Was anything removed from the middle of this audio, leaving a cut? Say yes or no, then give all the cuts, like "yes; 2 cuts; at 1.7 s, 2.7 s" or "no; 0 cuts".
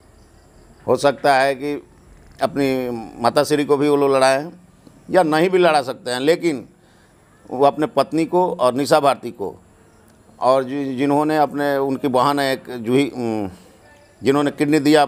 no; 0 cuts